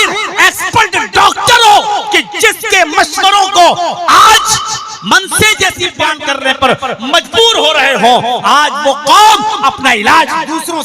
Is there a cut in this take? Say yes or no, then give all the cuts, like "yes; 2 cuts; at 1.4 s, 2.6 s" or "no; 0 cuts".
yes; 1 cut; at 5.9 s